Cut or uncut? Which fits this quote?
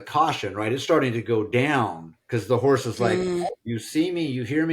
cut